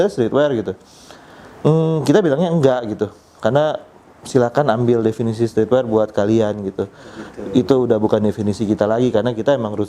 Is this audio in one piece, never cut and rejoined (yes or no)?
yes